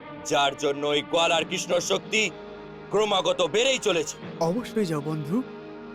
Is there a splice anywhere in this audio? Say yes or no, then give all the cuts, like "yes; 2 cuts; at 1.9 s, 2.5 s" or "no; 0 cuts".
no; 0 cuts